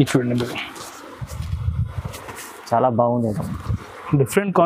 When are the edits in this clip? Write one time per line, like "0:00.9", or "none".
none